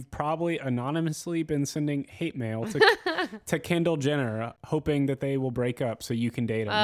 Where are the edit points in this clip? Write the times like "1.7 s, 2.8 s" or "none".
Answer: none

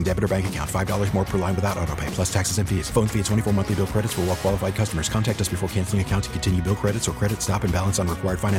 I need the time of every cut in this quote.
none

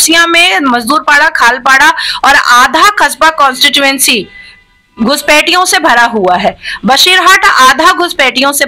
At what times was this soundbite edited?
none

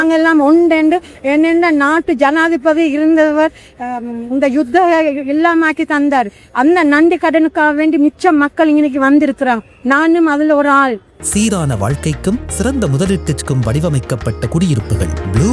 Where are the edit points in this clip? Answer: 11.2 s

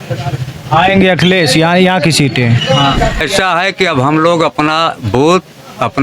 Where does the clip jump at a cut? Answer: 3.2 s

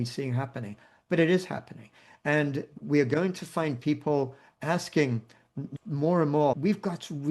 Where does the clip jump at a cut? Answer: 5.6 s, 6.6 s

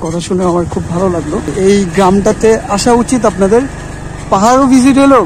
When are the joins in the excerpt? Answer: 1.5 s

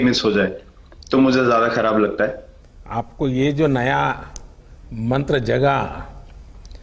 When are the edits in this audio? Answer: 2.7 s

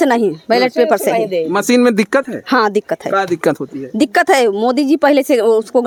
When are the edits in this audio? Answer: none

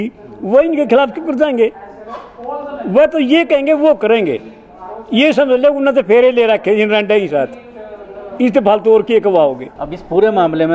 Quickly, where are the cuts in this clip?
none

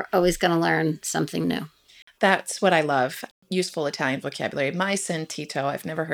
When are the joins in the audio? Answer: 3.3 s

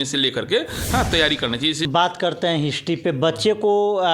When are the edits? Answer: 1.9 s

